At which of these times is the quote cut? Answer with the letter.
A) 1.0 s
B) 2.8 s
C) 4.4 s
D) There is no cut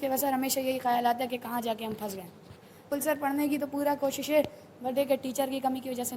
B